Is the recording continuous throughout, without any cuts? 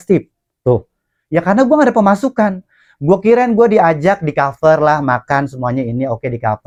yes; 0 cuts

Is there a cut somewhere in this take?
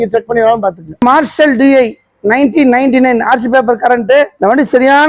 no; 0 cuts

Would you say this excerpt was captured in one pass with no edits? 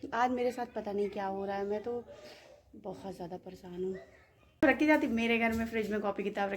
no; 1 cut; at 4.6 s

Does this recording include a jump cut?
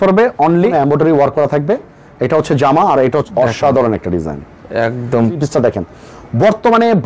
yes; 3 cuts; at 0.7 s, 3.3 s, 5.4 s

